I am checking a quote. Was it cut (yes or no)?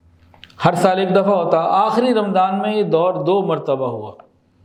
no